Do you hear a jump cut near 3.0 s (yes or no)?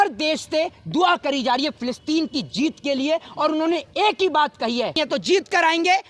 no